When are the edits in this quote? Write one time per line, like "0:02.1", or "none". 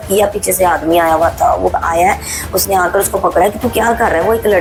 none